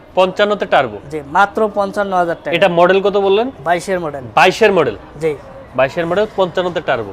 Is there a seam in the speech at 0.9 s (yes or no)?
no